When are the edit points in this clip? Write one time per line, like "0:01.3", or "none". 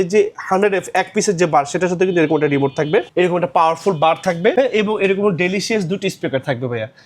0:03.1
0:04.5